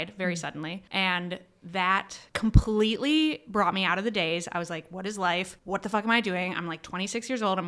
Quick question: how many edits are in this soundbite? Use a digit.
3